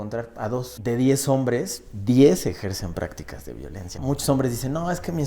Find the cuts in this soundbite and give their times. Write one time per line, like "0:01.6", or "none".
0:00.8
0:03.9